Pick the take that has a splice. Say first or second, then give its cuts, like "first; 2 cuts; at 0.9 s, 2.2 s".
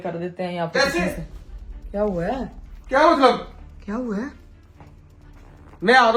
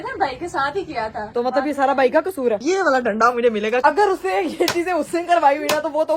second; 3 cuts; at 1.3 s, 2.6 s, 3.8 s